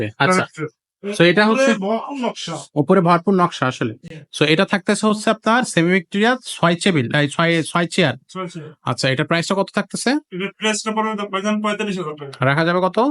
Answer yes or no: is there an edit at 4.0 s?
no